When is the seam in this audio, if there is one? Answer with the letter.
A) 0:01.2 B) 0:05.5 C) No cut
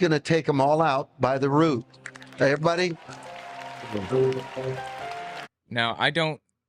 C